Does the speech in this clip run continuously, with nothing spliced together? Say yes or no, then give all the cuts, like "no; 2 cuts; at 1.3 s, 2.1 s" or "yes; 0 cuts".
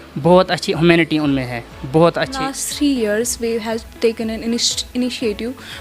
no; 1 cut; at 2.6 s